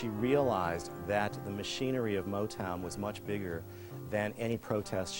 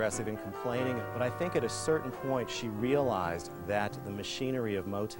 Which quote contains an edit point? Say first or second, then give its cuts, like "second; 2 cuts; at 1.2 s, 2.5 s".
second; 1 cut; at 1.0 s